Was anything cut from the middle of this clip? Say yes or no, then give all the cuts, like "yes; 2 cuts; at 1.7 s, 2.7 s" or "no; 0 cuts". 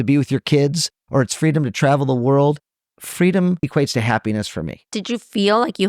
yes; 2 cuts; at 3.6 s, 4.9 s